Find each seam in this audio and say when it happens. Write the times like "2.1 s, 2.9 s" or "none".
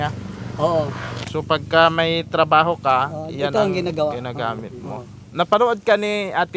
1.1 s, 5.2 s